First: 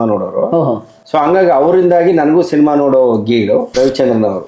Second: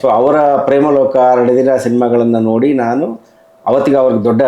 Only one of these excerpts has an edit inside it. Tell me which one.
first; 2 cuts; at 0.9 s, 3.7 s

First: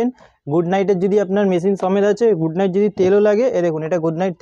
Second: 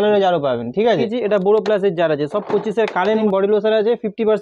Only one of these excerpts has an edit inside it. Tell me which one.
second; 2 cuts; at 1.1 s, 3.2 s

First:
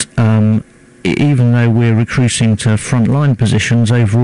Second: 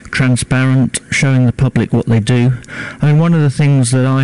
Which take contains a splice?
first; 1 cut; at 1.6 s

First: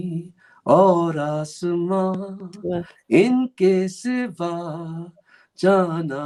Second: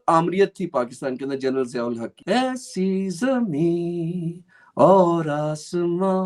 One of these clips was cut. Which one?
second; 1 cut; at 2.2 s

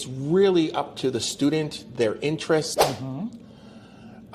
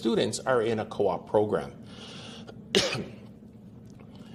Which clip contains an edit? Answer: first; 1 cut; at 2.8 s

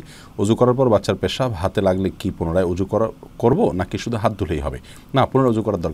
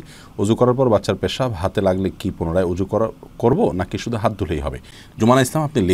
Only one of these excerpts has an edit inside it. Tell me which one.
second; 1 cut; at 5.0 s

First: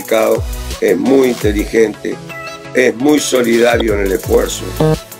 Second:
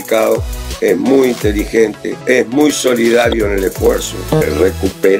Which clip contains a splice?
second; 2 cuts; at 2.1 s, 4.4 s

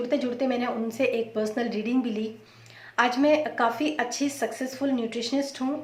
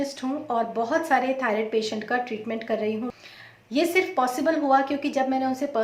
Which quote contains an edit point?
second; 1 cut; at 3.1 s

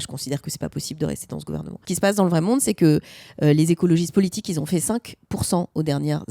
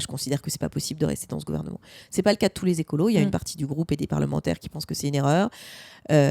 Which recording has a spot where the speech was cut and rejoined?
first; 1 cut; at 1.8 s

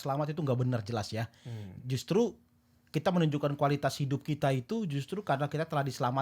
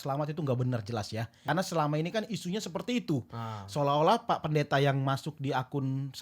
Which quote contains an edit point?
second; 1 cut; at 1.5 s

